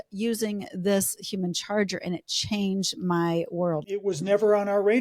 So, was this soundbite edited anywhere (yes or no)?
yes